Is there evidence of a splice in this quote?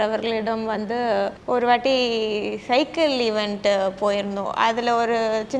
yes; 1 cut; at 1.4 s

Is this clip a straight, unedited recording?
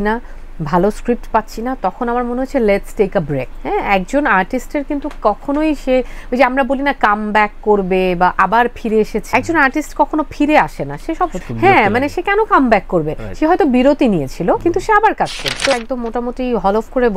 no; 1 cut; at 15.7 s

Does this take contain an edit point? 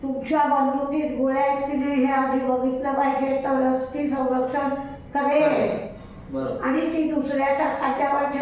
no; 0 cuts

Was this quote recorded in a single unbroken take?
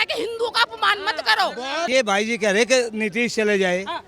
no; 1 cut; at 1.9 s

